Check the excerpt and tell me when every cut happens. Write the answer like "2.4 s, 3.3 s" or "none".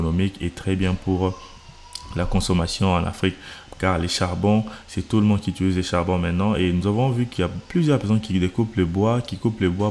none